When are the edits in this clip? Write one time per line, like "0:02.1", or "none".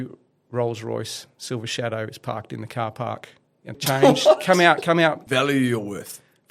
0:03.8
0:05.2

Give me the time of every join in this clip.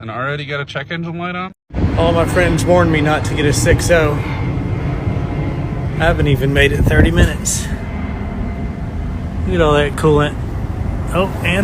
none

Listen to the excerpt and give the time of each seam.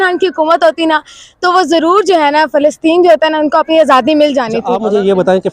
0:04.6

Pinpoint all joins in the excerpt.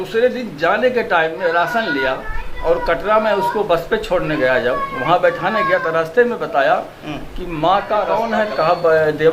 0:08.2

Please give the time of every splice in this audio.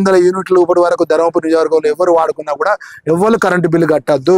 none

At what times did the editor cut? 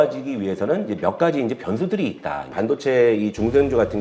0:02.5

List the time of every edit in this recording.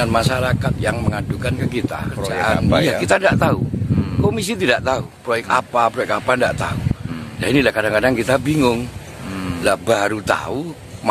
0:02.3

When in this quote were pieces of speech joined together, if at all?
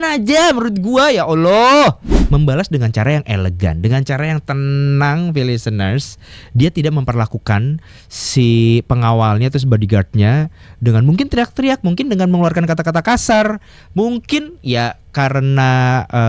0:02.1

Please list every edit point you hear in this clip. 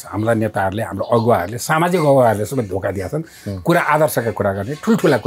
none

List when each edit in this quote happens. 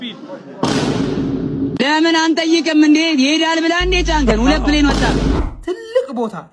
0:05.4

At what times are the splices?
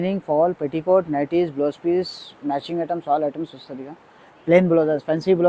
none

